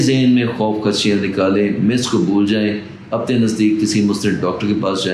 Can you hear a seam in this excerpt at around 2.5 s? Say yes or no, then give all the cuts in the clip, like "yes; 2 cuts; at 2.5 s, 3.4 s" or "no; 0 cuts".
no; 0 cuts